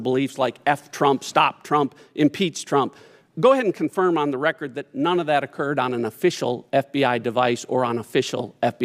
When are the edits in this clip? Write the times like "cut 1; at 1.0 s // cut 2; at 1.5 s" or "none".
none